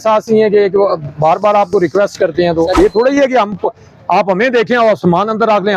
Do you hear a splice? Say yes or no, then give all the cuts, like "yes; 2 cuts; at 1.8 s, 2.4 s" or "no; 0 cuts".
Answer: yes; 1 cut; at 2.8 s